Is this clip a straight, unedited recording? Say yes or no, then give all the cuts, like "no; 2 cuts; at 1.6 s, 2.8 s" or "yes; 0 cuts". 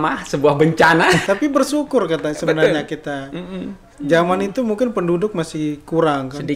no; 1 cut; at 1.2 s